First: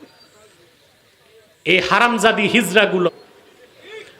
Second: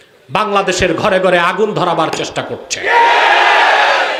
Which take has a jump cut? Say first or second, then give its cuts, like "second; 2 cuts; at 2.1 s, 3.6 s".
first; 1 cut; at 3.1 s